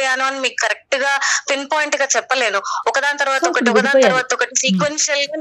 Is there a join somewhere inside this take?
no; 0 cuts

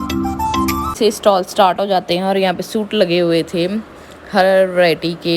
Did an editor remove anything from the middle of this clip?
yes; 1 cut; at 0.9 s

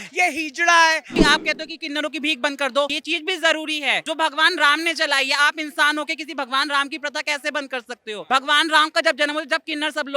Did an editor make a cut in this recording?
yes; 4 cuts; at 1.2 s, 3.0 s, 4.0 s, 8.2 s

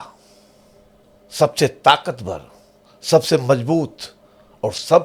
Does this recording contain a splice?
no; 0 cuts

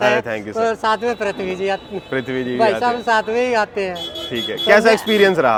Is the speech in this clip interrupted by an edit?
no; 0 cuts

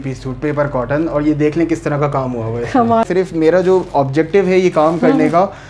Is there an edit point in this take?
yes; 1 cut; at 3.0 s

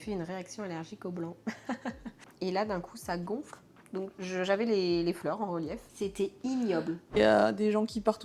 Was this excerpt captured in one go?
no; 3 cuts; at 2.2 s, 5.9 s, 7.2 s

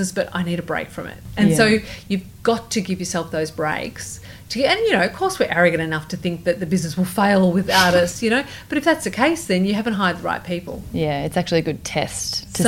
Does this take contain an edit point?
no; 0 cuts

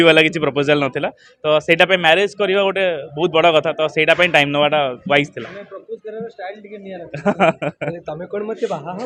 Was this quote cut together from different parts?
no; 0 cuts

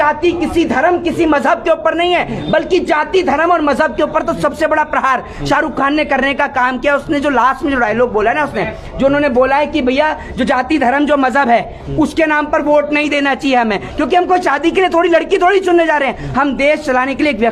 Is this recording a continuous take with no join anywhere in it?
yes; 0 cuts

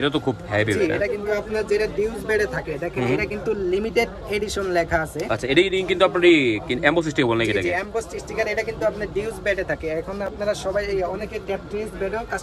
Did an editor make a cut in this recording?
no; 0 cuts

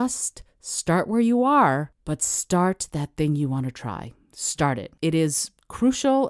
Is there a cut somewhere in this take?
yes; 2 cuts; at 1.9 s, 4.9 s

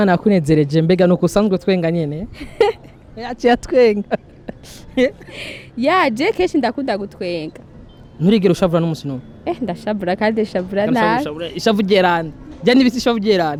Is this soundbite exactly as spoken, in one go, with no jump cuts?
yes; 0 cuts

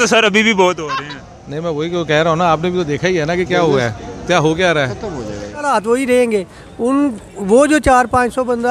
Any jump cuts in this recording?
yes; 1 cut; at 5.6 s

